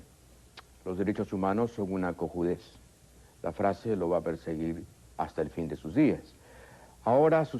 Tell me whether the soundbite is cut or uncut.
cut